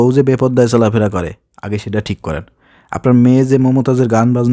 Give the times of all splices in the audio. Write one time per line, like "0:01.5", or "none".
none